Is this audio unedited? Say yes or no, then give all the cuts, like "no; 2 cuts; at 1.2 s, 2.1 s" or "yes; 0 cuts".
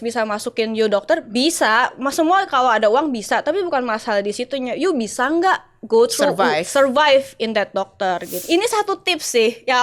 no; 1 cut; at 8.4 s